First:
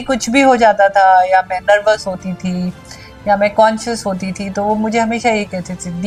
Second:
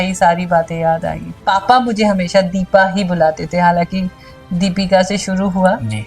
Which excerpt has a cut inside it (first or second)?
second